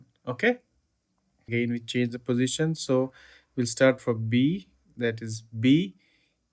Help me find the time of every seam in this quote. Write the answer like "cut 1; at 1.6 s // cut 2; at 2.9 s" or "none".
cut 1; at 1.5 s